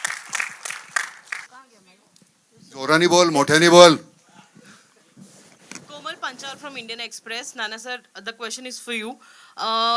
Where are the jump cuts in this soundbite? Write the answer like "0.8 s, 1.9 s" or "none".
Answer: 1.5 s